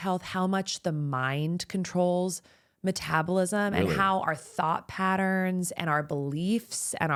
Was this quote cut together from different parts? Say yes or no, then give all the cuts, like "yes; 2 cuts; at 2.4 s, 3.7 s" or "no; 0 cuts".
no; 0 cuts